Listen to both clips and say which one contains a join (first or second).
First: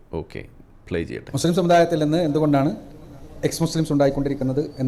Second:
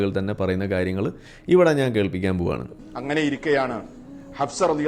second